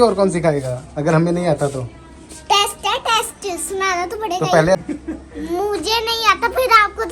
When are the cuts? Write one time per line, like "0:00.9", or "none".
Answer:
0:04.8